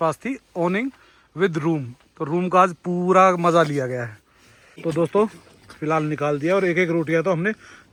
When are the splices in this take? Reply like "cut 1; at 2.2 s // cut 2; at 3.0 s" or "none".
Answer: none